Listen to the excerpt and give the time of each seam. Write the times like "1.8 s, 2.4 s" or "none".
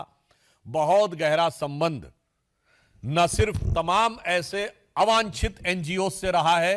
none